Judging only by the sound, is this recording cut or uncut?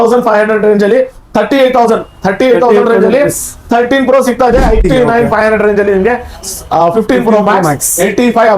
cut